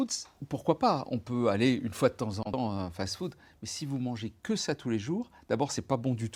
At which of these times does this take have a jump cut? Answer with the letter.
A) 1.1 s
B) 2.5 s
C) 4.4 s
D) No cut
B